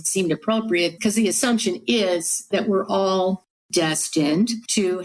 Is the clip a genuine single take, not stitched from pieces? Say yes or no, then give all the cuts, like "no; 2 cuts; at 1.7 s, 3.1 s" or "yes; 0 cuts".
yes; 0 cuts